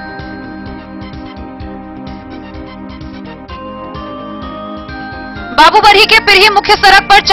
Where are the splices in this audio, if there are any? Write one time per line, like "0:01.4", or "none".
none